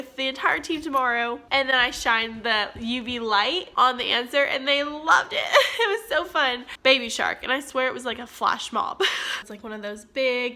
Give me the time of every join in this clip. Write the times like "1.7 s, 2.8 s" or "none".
1.4 s, 6.7 s, 9.4 s